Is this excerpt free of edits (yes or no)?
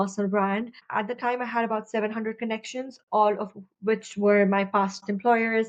yes